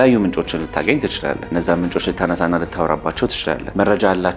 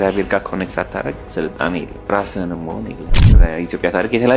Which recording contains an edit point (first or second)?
second